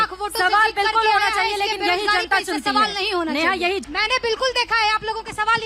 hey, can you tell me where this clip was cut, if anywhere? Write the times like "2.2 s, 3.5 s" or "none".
3.8 s